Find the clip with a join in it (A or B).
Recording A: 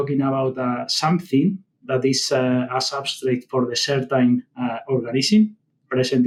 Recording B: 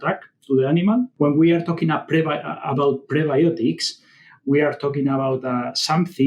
B